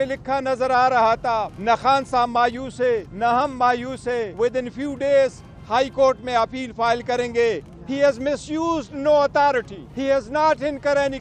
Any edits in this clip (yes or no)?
yes